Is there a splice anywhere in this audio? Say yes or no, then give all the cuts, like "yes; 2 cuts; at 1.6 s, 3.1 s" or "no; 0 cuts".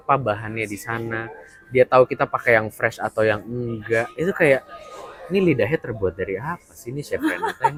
no; 0 cuts